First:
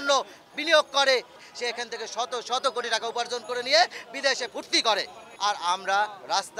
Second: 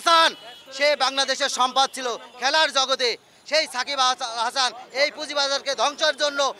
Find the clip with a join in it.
first; 2 cuts; at 1.4 s, 5.2 s

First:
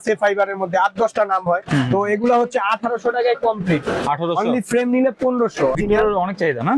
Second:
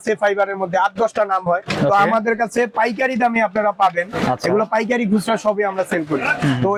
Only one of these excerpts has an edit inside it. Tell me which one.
first; 2 cuts; at 1.6 s, 5.8 s

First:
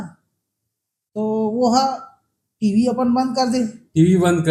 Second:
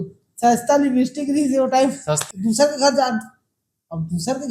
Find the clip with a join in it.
second; 1 cut; at 2.2 s

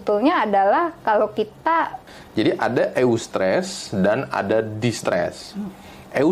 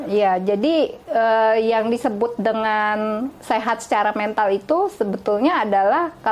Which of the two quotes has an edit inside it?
first; 1 cut; at 2.0 s

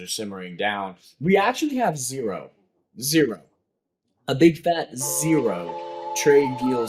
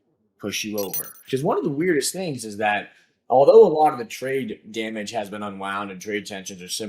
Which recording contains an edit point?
second; 1 cut; at 1.2 s

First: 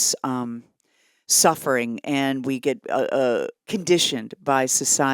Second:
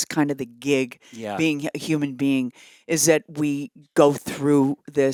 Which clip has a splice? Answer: first; 1 cut; at 3.6 s

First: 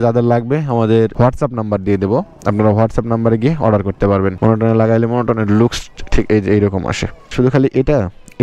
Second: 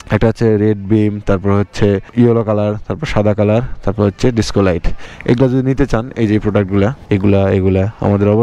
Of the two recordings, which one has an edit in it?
first; 3 cuts; at 1.1 s, 4.4 s, 7.3 s

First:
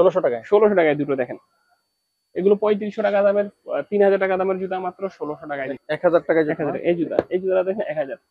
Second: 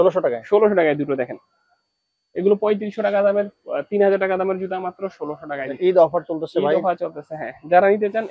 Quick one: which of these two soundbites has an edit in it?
first; 1 cut; at 5.8 s

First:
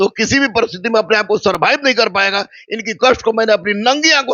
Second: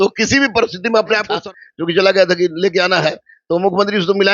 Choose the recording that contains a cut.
second; 1 cut; at 1.3 s

